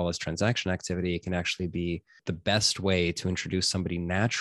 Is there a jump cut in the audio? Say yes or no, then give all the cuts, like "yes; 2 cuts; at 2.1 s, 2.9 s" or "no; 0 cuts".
yes; 1 cut; at 2.2 s